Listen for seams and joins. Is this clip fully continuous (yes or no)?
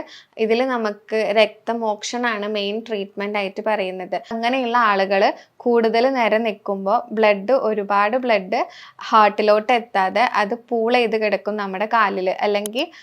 no